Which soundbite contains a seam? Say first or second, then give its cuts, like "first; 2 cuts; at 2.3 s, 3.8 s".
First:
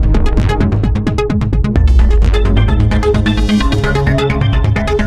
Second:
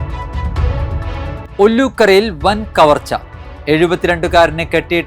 second; 1 cut; at 1.5 s